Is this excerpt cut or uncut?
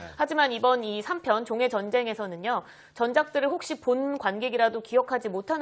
cut